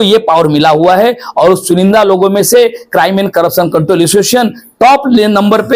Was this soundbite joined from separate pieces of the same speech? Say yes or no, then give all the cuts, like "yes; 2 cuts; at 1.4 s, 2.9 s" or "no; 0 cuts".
no; 0 cuts